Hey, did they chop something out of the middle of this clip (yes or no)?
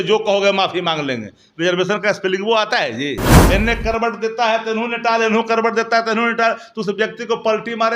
yes